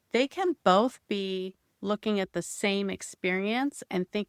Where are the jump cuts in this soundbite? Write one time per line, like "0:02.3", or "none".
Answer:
none